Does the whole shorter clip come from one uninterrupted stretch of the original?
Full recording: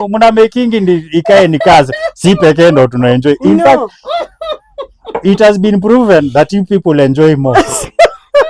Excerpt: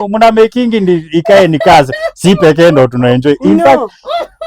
yes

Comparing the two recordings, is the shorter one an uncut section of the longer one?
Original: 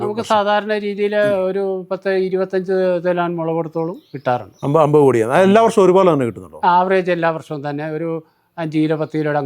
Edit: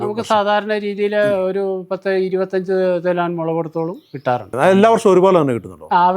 no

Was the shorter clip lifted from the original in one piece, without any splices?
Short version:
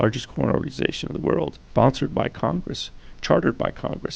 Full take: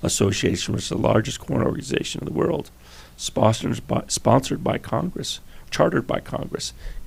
no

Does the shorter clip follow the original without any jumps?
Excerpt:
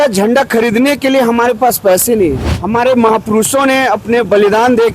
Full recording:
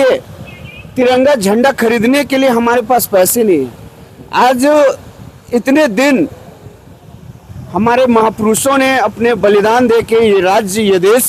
no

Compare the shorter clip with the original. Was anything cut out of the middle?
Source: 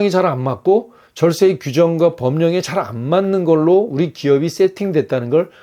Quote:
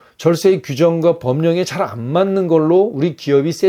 no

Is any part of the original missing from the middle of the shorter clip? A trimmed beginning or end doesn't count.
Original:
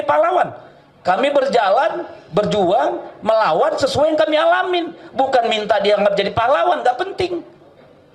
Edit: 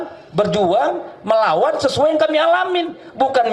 no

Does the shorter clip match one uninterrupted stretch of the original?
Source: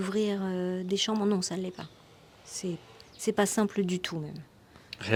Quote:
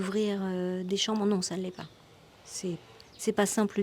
yes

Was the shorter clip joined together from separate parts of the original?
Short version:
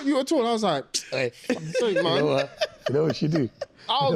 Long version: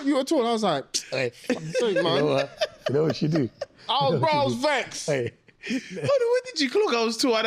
no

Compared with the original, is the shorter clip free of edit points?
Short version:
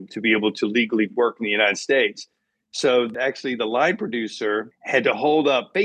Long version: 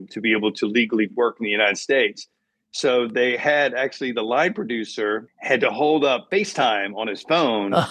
no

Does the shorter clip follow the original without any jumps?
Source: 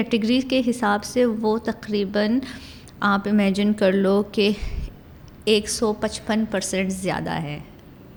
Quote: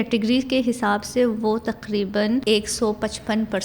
no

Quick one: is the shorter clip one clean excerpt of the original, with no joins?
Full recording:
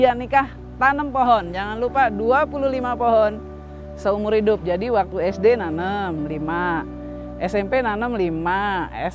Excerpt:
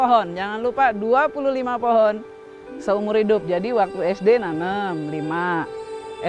yes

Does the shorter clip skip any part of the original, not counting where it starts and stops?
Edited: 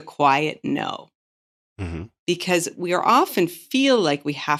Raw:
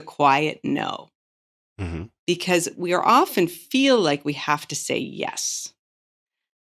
no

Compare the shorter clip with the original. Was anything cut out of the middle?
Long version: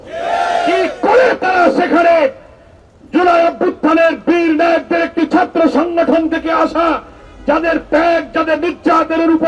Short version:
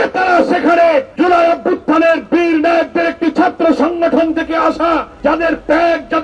yes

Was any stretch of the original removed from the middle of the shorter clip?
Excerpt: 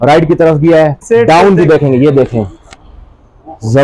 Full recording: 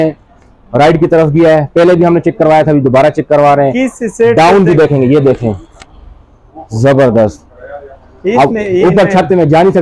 yes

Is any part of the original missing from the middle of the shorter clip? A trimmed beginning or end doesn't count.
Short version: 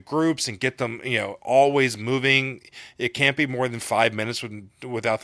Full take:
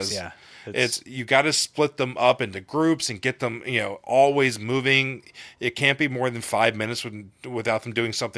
no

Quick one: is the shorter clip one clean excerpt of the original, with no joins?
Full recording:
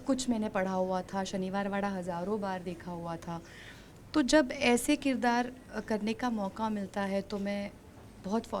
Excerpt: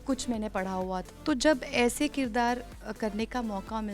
no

